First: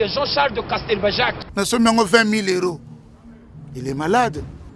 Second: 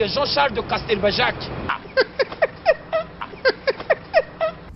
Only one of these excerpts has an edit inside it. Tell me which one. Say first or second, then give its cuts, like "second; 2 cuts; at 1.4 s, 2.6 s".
first; 1 cut; at 1.4 s